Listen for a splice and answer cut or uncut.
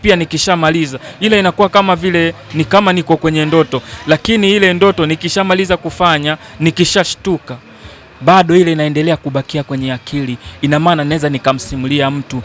uncut